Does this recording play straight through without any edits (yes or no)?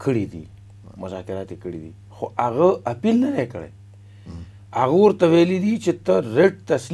yes